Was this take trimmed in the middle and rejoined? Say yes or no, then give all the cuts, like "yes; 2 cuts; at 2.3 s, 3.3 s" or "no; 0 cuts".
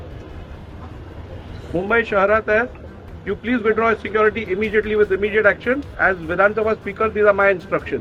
no; 0 cuts